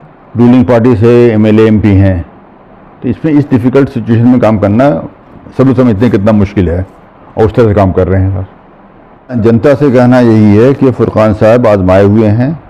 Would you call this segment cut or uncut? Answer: cut